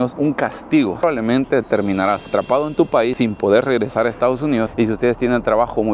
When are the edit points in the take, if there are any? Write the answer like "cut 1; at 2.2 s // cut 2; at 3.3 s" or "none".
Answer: cut 1; at 1.0 s // cut 2; at 4.7 s